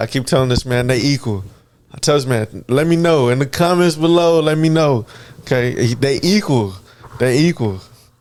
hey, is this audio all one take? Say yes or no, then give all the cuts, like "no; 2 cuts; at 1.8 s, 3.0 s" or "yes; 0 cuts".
yes; 0 cuts